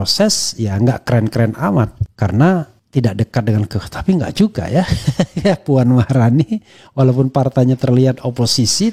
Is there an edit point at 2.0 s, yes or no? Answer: yes